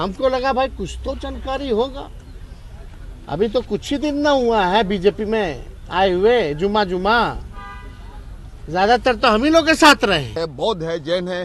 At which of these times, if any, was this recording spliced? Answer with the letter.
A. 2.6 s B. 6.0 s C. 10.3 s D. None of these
C